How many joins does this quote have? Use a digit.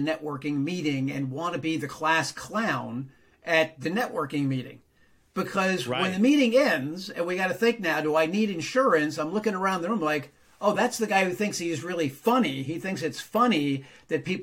0